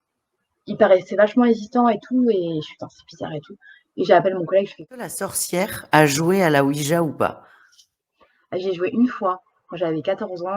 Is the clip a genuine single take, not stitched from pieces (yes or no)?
no